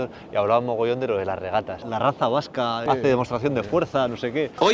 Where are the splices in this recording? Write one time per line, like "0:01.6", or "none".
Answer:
none